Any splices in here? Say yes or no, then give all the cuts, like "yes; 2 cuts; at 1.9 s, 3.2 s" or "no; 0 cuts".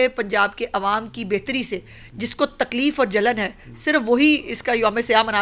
no; 0 cuts